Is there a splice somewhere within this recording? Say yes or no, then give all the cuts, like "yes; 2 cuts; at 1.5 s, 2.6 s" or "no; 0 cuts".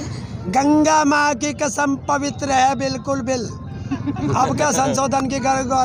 no; 0 cuts